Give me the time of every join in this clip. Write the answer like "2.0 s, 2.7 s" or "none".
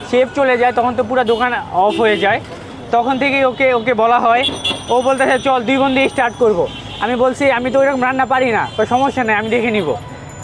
none